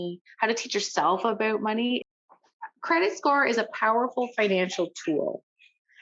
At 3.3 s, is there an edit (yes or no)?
no